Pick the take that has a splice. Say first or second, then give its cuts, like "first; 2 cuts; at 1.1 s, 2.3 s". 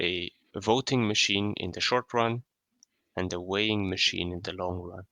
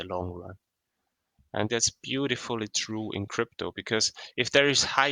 second; 1 cut; at 1.7 s